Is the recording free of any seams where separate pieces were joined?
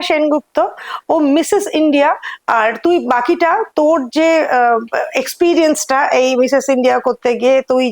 yes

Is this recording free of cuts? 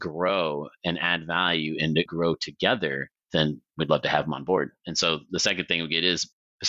no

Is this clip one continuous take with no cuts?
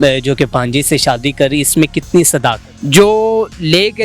no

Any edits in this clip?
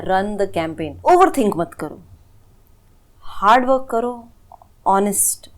yes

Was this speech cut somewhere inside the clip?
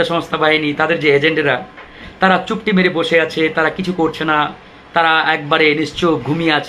no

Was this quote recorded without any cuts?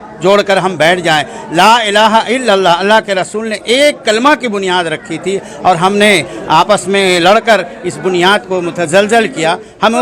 yes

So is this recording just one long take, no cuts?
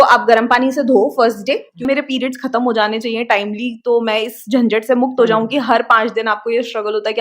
no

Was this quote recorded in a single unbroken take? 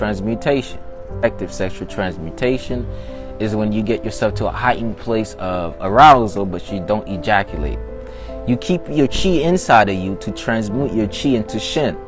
no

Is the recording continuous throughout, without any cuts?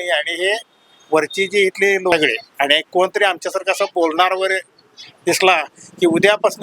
no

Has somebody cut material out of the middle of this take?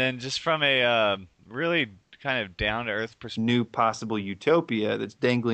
no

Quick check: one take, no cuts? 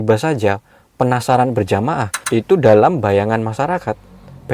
yes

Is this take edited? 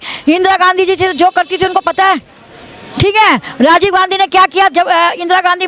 no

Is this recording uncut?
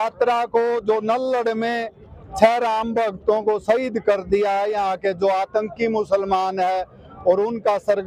yes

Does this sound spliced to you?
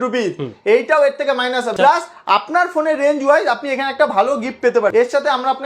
yes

